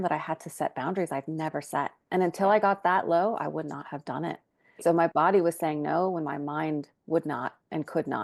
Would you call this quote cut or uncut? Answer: cut